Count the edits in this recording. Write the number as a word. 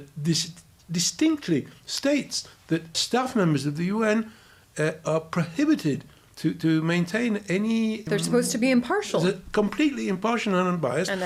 two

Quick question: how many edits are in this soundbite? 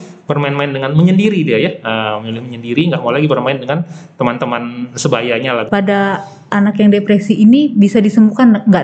one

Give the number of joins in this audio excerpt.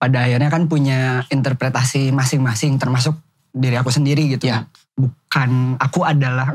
one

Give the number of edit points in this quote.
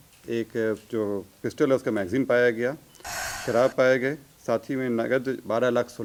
zero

